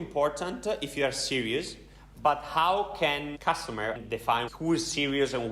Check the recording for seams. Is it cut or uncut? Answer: cut